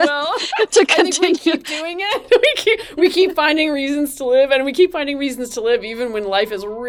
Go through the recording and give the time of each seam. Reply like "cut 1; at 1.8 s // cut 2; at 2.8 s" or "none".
none

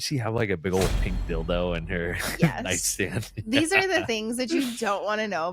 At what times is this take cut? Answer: none

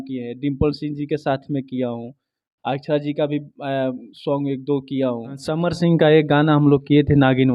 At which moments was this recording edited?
cut 1; at 5.7 s

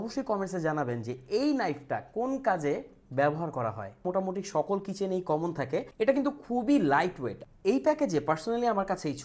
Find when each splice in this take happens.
cut 1; at 4.0 s // cut 2; at 5.9 s // cut 3; at 7.5 s

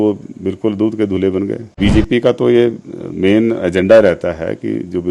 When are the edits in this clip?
cut 1; at 1.7 s

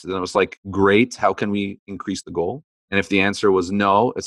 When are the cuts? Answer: cut 1; at 2.9 s

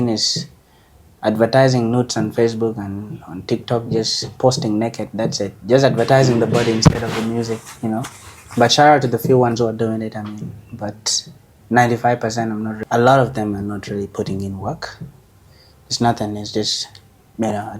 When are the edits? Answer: cut 1; at 12.8 s

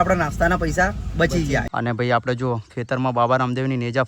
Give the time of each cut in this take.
cut 1; at 1.7 s

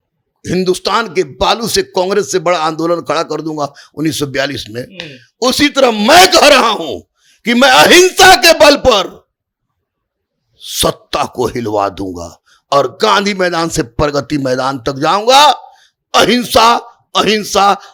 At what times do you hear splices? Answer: none

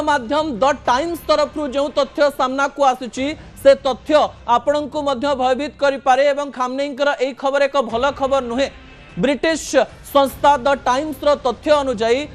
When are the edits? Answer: none

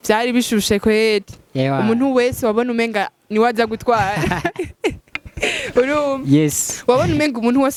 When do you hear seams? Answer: none

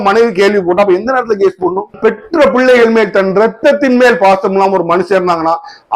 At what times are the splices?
cut 1; at 1.9 s

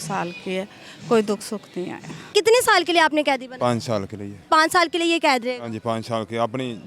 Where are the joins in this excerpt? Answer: cut 1; at 2.2 s

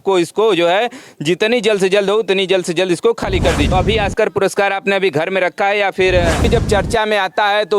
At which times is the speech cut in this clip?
cut 1; at 3.6 s // cut 2; at 6.5 s

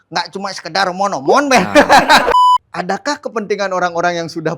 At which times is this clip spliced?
cut 1; at 2.3 s

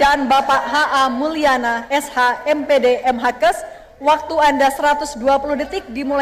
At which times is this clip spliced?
cut 1; at 5.0 s

